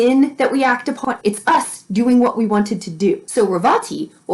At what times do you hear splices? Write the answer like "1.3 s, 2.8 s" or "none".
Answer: 1.0 s, 3.2 s